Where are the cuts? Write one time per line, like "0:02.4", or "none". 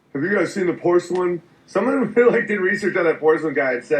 0:01.0